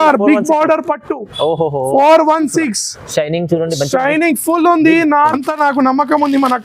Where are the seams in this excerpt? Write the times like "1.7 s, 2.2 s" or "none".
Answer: 5.3 s